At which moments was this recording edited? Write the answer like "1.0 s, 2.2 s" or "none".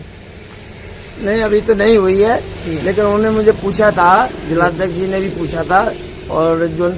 none